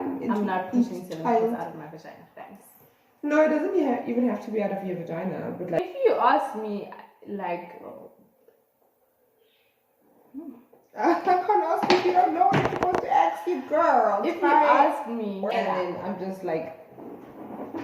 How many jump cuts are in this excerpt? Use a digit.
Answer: 2